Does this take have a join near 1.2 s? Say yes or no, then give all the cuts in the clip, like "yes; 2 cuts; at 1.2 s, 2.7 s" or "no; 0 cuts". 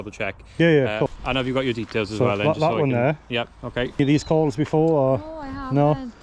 yes; 2 cuts; at 1.2 s, 4.0 s